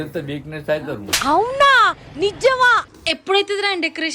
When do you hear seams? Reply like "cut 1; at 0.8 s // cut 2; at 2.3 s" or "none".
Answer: cut 1; at 2.9 s